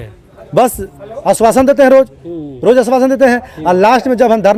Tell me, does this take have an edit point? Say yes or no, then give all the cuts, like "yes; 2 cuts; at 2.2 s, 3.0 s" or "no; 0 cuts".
no; 0 cuts